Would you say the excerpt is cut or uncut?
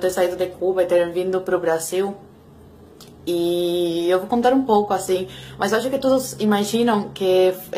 cut